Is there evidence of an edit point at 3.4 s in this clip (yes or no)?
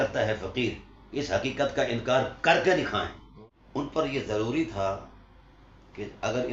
yes